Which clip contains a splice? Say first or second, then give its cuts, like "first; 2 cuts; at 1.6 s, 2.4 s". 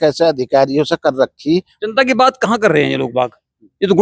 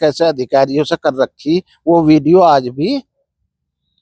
first; 1 cut; at 1.7 s